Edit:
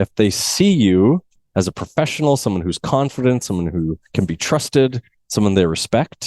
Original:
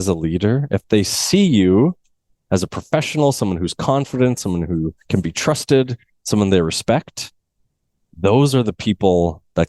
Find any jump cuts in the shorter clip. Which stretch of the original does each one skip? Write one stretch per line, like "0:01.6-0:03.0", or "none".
0:02.1-0:02.3